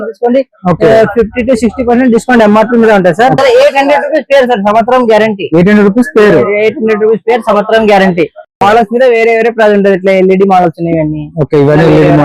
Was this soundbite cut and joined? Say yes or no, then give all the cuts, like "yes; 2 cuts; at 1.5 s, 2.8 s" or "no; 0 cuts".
yes; 1 cut; at 3.4 s